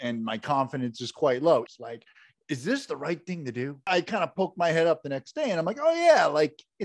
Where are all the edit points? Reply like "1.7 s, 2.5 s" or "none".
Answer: 1.7 s, 3.9 s